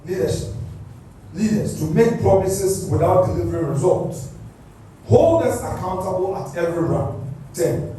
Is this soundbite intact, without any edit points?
yes; 0 cuts

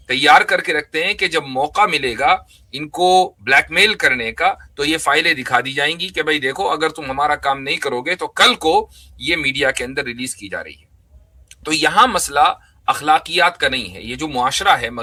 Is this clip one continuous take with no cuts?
yes; 0 cuts

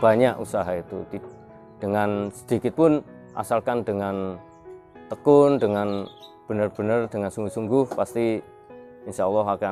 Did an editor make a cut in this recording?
no; 0 cuts

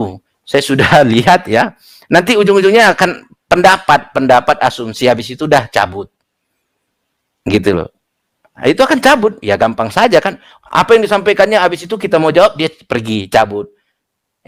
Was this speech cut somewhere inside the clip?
no; 0 cuts

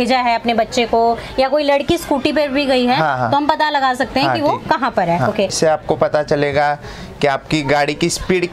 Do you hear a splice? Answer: yes; 1 cut; at 5.5 s

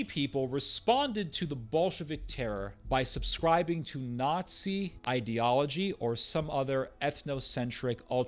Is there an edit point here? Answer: yes; 2 cuts; at 2.8 s, 5.0 s

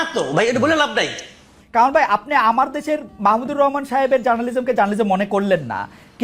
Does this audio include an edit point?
yes; 1 cut; at 1.5 s

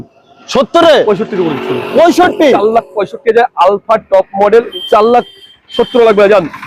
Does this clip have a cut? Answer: yes; 1 cut; at 4.8 s

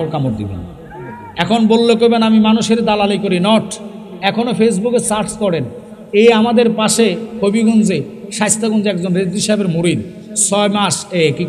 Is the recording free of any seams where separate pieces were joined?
yes; 0 cuts

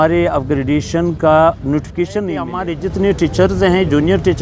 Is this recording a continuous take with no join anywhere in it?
no; 1 cut; at 2.6 s

